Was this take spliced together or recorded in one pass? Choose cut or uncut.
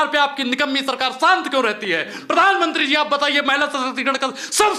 uncut